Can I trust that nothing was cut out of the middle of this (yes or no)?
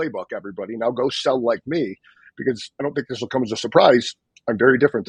yes